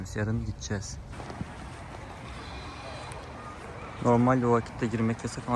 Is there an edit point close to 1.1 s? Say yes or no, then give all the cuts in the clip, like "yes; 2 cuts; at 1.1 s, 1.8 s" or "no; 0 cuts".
yes; 1 cut; at 1.1 s